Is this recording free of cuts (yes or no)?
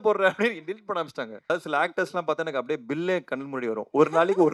no